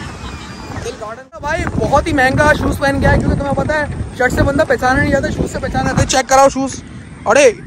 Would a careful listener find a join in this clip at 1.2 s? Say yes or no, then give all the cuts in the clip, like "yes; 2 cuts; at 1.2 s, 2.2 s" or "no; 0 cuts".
yes; 1 cut; at 1.2 s